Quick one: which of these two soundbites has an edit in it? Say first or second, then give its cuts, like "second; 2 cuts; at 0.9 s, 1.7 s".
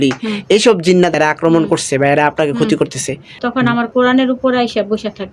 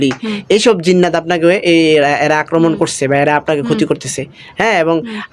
first; 2 cuts; at 1.1 s, 3.4 s